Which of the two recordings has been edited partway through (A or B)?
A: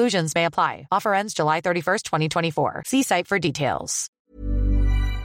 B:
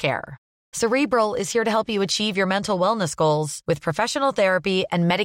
A